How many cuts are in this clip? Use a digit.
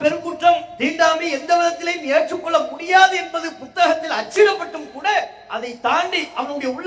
0